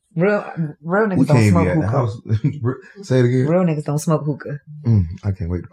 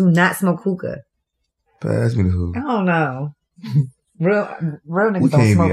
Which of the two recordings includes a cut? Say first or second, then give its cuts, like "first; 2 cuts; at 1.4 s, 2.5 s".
second; 1 cut; at 1.7 s